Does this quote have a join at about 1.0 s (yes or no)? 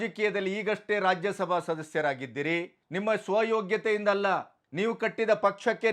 no